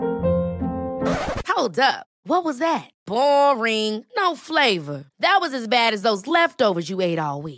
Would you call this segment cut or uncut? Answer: uncut